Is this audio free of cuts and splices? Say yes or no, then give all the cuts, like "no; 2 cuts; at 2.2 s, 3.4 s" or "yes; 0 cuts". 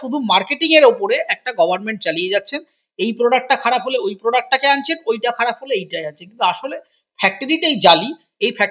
yes; 0 cuts